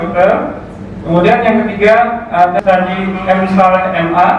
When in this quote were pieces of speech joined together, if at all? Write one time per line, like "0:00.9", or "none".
0:02.5